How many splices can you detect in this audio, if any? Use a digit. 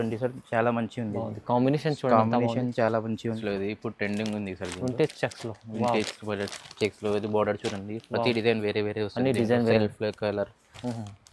1